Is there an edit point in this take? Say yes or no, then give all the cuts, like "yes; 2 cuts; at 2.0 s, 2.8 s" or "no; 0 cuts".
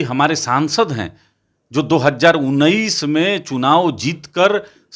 no; 0 cuts